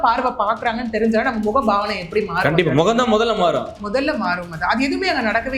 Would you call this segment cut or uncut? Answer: uncut